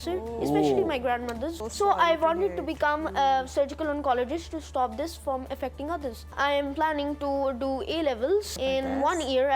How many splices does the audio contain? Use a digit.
3